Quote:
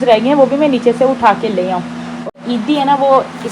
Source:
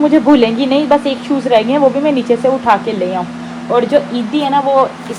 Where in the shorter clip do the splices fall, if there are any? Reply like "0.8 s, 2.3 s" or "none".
2.3 s